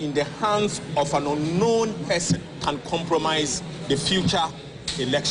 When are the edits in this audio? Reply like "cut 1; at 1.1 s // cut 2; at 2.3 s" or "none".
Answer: cut 1; at 2.5 s // cut 2; at 3.7 s